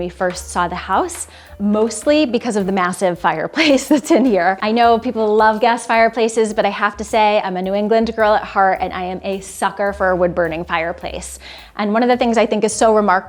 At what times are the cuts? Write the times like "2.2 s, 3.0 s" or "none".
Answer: none

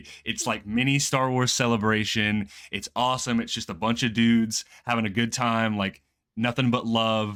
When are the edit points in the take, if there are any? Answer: none

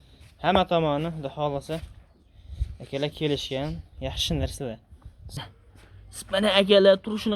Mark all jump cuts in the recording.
5.4 s

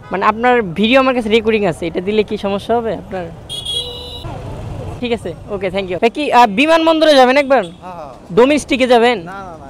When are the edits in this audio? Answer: 6.0 s

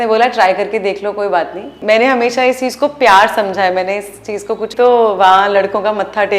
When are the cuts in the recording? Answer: 1.7 s, 4.7 s

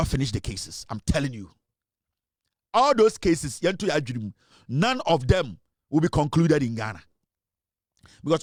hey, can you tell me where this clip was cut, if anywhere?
none

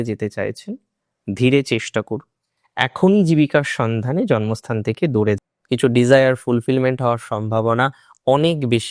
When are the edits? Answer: 5.4 s

